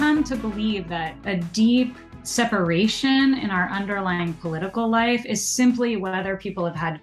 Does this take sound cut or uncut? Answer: cut